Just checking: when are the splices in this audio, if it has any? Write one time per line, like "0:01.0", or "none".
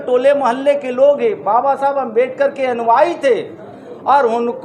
none

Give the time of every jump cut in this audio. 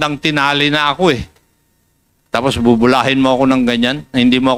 none

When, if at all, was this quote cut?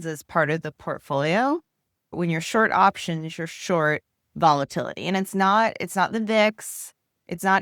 0:02.1

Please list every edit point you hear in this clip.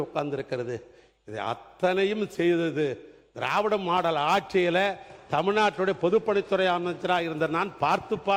none

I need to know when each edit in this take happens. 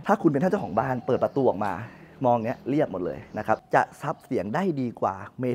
0:03.6

